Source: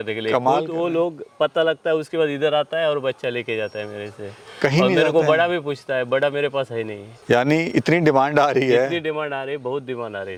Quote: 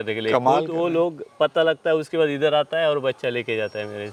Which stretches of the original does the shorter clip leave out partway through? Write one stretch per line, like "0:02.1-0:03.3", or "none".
none